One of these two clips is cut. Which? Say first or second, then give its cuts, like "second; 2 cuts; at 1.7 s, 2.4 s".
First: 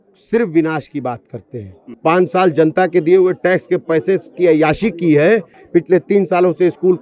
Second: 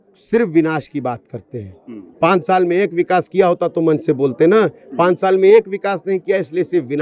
first; 2 cuts; at 1.9 s, 5.6 s